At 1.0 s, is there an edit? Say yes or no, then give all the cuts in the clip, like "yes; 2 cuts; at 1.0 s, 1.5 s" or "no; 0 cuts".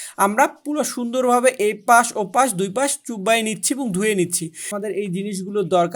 no; 1 cut; at 4.7 s